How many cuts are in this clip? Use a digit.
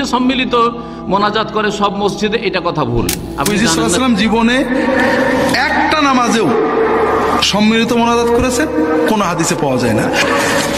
1